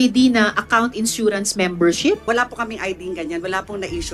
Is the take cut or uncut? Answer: cut